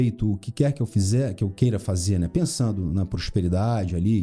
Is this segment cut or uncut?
uncut